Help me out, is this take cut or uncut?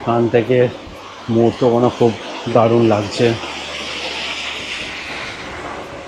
uncut